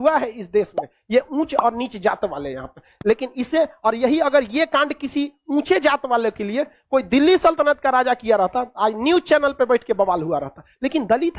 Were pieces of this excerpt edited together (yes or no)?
no